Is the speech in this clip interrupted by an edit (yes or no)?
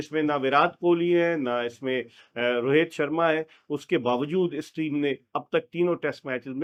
no